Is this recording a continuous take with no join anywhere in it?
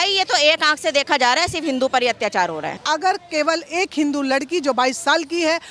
no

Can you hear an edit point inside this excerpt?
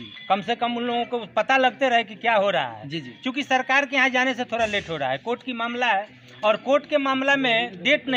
no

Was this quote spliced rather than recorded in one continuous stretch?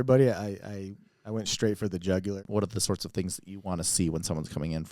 yes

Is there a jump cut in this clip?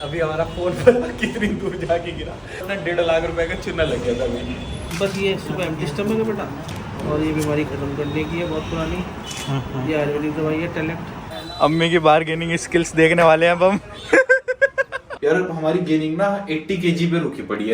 yes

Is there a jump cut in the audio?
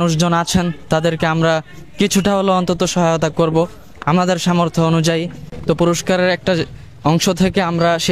no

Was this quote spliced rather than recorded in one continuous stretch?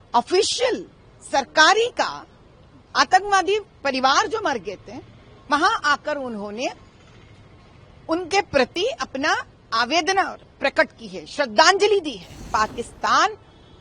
yes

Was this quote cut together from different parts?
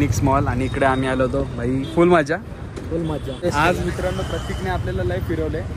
yes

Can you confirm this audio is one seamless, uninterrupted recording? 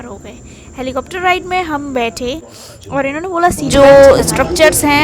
no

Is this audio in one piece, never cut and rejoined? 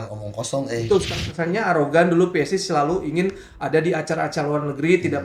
no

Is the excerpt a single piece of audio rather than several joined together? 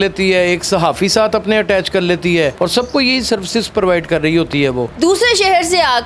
no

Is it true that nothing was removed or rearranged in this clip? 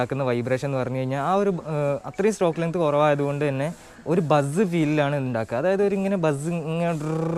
yes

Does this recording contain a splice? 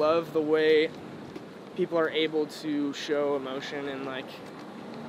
no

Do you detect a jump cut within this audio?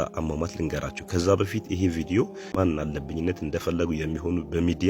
yes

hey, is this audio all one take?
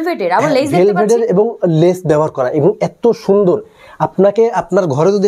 yes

